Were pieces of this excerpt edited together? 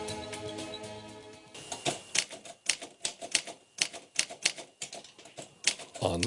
yes; 1 cut; at 1.3 s

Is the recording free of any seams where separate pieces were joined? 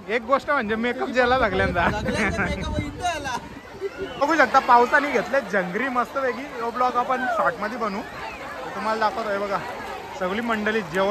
no; 1 cut; at 4.0 s

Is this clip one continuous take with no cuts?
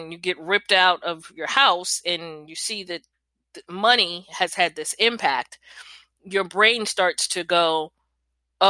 yes; 0 cuts

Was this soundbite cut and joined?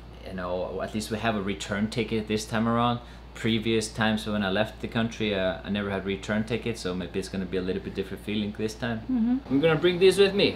yes; 1 cut; at 9.4 s

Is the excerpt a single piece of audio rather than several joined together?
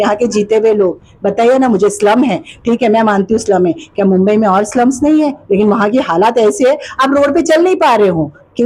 yes; 0 cuts

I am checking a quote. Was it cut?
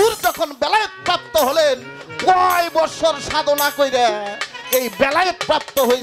no; 0 cuts

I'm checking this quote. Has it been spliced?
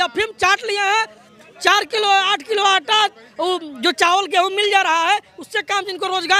no; 0 cuts

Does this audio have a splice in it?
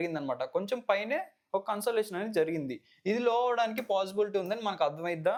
no; 0 cuts

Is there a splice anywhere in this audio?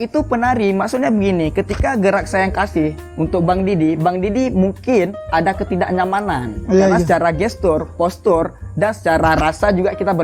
no; 0 cuts

